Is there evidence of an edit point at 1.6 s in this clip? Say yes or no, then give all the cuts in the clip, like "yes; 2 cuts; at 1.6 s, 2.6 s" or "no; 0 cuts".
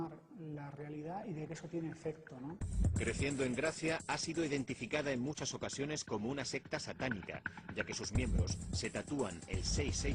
yes; 1 cut; at 1.6 s